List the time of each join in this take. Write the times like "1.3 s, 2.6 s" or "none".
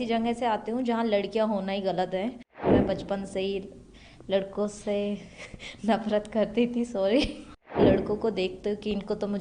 2.7 s, 7.7 s